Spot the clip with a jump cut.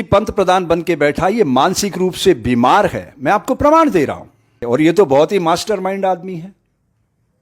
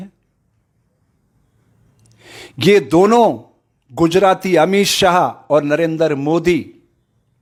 first; 1 cut; at 4.6 s

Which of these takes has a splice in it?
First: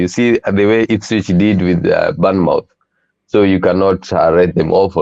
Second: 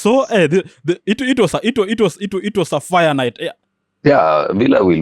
second; 1 cut; at 3.6 s

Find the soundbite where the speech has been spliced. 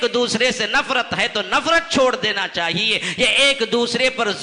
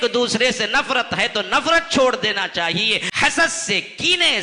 second; 1 cut; at 3.0 s

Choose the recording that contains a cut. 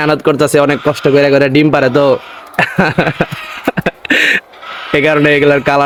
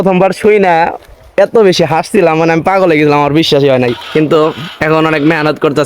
second; 1 cut; at 4.0 s

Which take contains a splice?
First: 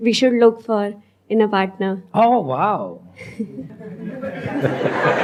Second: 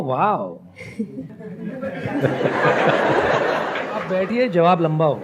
second; 1 cut; at 4.1 s

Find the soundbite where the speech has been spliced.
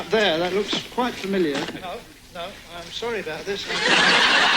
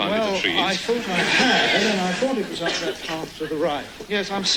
first; 1 cut; at 1.7 s

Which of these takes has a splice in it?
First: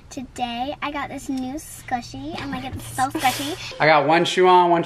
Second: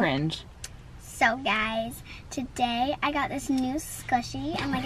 first; 1 cut; at 3.7 s

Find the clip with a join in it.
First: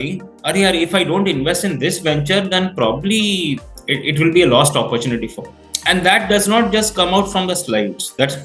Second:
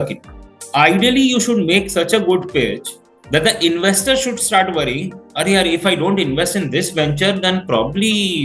first; 1 cut; at 5.6 s

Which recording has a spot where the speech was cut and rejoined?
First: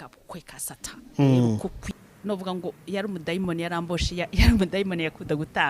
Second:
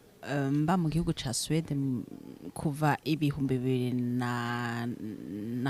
first; 1 cut; at 1.8 s

